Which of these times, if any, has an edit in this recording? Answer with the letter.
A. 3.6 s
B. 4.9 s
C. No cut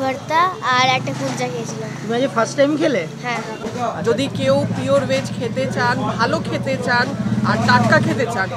A